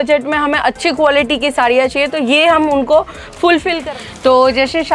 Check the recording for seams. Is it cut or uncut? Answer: cut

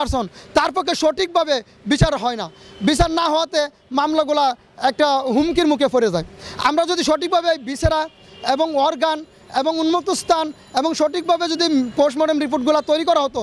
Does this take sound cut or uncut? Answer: uncut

